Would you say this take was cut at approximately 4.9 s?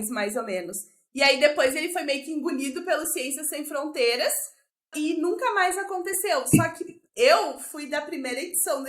yes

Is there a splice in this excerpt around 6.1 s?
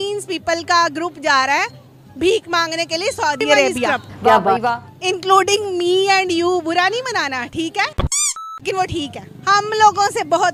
no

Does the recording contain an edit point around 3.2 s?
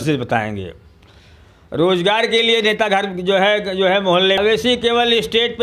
no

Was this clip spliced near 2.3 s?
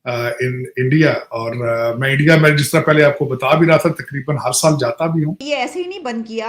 no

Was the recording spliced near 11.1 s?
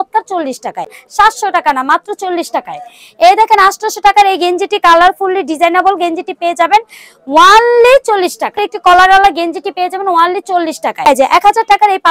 yes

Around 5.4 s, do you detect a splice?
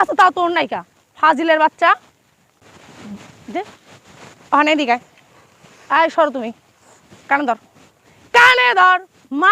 no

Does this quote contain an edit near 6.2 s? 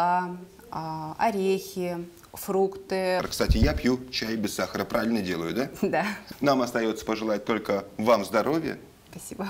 yes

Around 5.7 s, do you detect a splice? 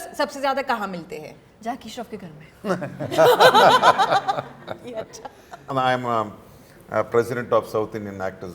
yes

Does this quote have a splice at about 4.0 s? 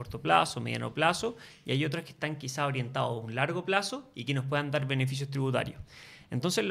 no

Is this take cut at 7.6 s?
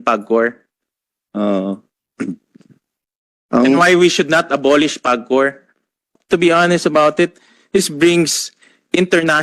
no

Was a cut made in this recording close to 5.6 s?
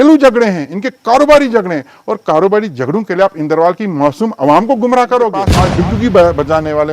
yes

